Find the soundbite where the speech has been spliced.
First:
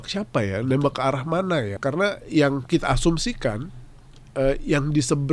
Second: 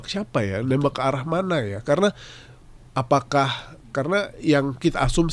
first; 1 cut; at 1.7 s

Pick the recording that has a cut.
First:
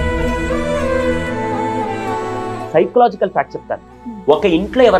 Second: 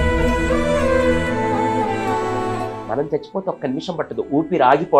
first; 1 cut; at 2.6 s

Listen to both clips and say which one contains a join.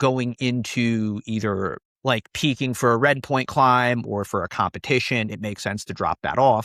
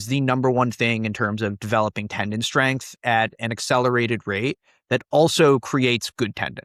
first; 1 cut; at 1.9 s

